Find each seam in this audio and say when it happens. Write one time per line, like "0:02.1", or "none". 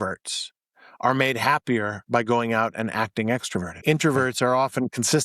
0:03.7

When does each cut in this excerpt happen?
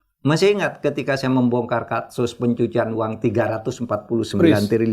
none

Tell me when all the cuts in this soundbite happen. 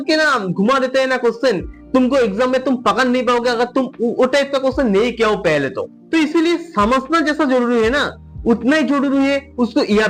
none

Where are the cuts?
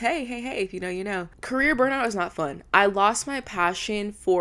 0:01.3

